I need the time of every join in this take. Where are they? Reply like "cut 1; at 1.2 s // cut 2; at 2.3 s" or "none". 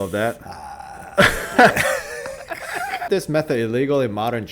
cut 1; at 3.1 s